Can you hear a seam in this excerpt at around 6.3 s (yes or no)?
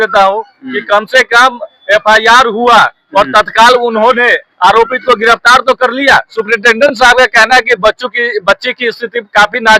yes